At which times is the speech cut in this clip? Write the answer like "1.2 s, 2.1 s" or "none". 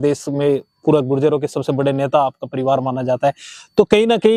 none